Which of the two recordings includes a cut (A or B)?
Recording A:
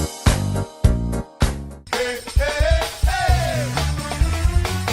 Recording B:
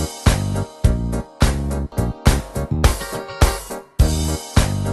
A